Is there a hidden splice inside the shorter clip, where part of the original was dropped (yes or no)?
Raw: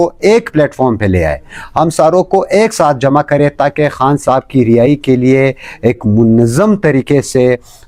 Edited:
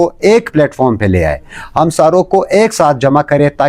no